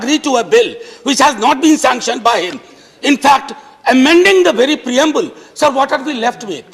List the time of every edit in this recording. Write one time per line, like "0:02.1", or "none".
none